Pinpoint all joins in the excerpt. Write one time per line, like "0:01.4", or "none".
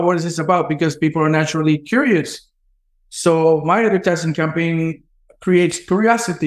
none